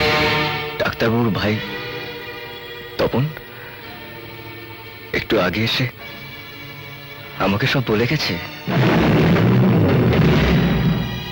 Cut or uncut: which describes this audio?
uncut